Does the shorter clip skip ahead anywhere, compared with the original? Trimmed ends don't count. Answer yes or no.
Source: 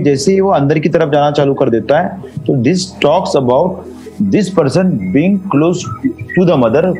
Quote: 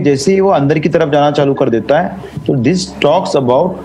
no